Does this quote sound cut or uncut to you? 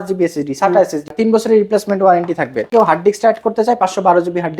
cut